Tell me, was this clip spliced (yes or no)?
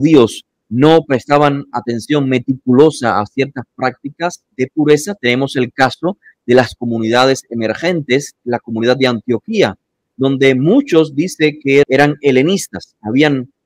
yes